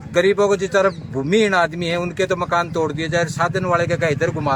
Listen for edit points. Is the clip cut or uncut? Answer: uncut